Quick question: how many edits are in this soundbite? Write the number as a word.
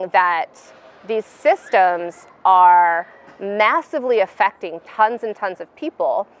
zero